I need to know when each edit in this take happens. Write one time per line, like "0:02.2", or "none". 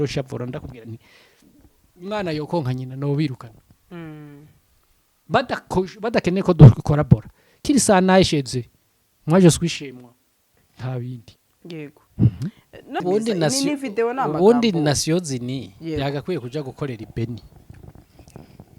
0:13.0